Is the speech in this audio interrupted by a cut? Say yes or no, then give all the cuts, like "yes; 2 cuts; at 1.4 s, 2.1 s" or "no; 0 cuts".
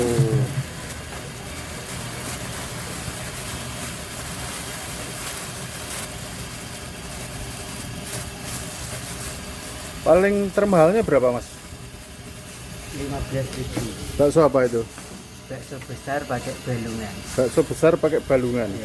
no; 0 cuts